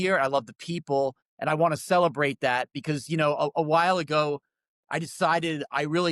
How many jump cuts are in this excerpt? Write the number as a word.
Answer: one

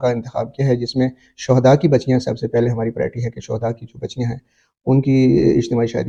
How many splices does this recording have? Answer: zero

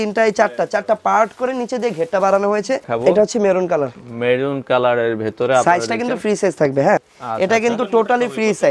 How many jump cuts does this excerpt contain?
two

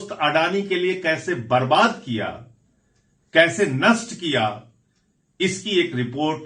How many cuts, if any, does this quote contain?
zero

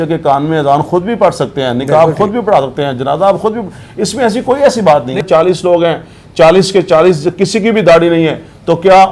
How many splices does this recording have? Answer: one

